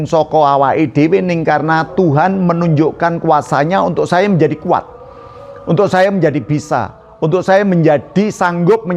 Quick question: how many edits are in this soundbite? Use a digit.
0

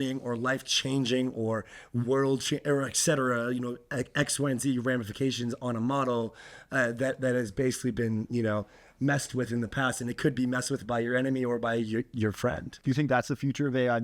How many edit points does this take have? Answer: 1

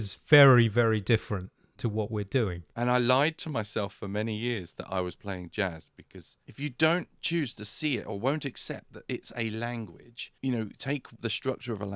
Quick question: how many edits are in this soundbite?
3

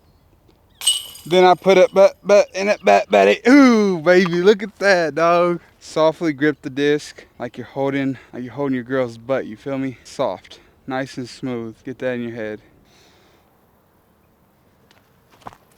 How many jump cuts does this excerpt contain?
2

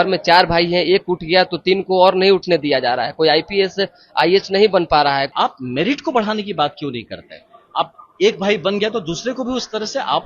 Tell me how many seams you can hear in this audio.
1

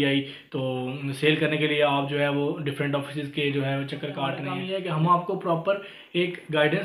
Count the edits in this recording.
1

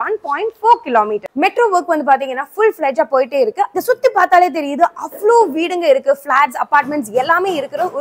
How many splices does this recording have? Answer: 2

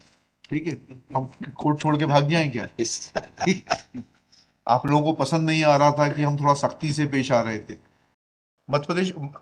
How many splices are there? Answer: 1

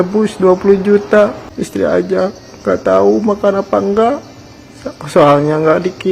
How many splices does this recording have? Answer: 1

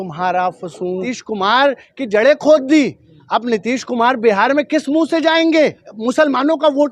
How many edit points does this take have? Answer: 2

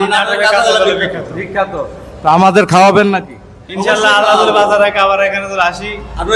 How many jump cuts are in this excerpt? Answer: 0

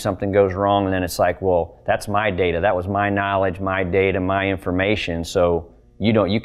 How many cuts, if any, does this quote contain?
0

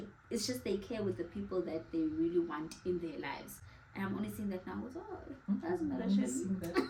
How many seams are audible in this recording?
0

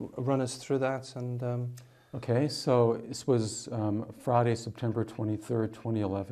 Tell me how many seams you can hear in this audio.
1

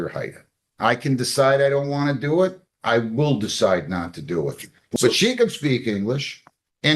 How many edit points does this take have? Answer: 1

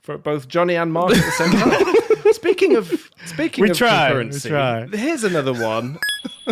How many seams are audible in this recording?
0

